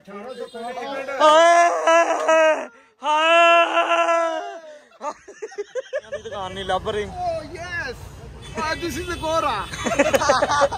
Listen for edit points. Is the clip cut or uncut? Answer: cut